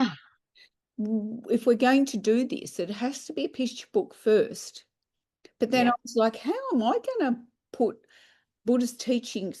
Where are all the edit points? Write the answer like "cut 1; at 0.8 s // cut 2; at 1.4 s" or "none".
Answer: none